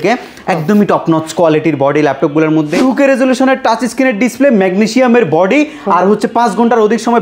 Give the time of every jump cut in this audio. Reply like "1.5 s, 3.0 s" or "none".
2.7 s